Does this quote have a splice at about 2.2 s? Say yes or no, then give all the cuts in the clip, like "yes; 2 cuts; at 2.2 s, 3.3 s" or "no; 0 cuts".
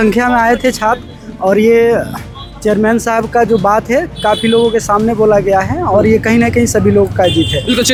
no; 0 cuts